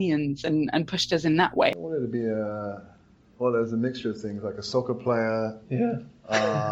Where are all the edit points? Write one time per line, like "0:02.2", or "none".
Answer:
0:01.7